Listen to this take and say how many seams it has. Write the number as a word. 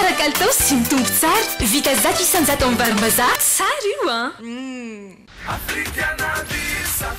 one